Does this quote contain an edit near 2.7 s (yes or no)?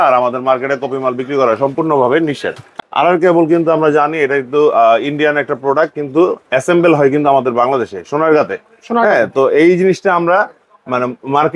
yes